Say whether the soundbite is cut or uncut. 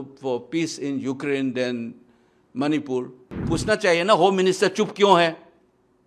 cut